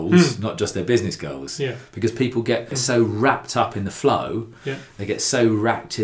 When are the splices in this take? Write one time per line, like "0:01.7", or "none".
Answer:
0:02.8

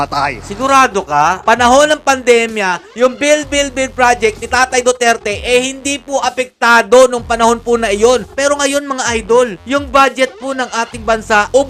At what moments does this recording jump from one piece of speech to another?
0:01.4
0:08.3

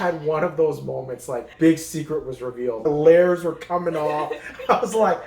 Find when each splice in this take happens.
0:01.5
0:02.8

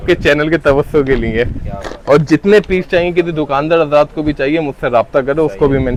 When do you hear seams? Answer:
none

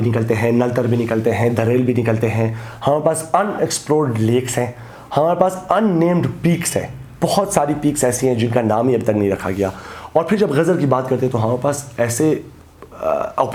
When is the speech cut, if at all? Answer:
none

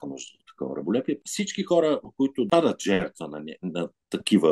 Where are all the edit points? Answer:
0:01.2
0:02.5

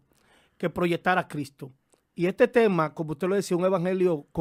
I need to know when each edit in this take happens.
none

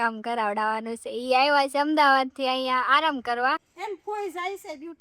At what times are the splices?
0:03.7

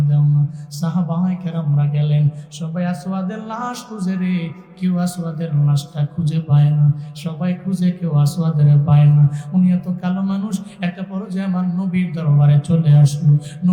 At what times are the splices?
none

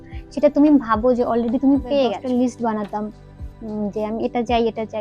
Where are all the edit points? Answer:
0:02.2

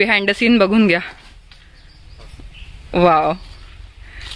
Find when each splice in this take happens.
none

